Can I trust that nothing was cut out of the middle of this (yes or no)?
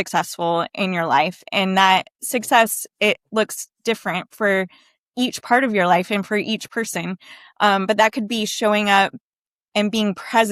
yes